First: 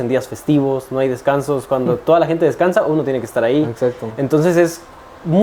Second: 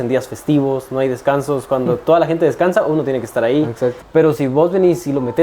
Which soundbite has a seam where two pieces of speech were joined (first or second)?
second